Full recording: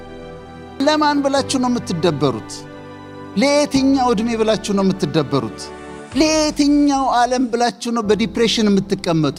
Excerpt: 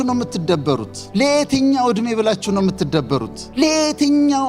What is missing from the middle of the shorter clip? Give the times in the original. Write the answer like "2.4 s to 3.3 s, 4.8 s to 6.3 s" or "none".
2.5 s to 3.2 s, 5.6 s to 6.0 s